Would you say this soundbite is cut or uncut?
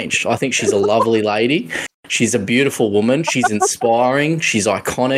uncut